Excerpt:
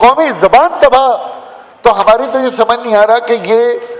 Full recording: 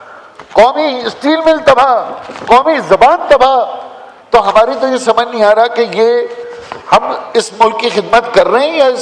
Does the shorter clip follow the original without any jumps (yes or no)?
yes